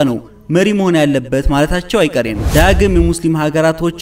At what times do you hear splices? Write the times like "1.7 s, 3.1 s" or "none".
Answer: 2.4 s

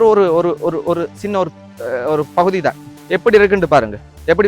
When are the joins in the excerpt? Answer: 2.9 s

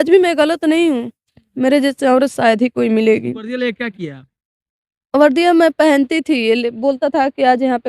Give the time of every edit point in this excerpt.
3.5 s

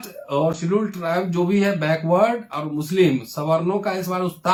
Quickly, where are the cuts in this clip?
none

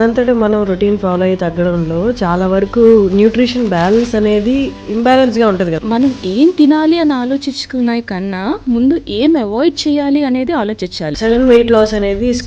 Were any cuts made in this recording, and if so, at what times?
4.8 s, 5.8 s, 11.0 s

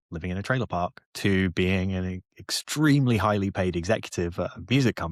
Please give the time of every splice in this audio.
none

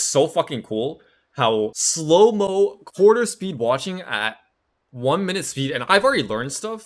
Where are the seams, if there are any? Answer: 1.9 s

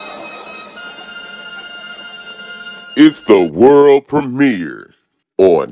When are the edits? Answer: 2.9 s

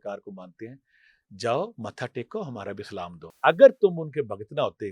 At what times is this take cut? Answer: 3.2 s

